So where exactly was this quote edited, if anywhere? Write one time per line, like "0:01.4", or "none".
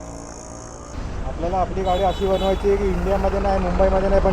0:00.9